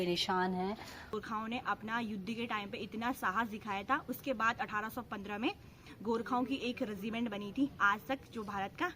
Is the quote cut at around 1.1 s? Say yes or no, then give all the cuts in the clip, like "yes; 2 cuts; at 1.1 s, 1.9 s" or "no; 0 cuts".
yes; 1 cut; at 1.1 s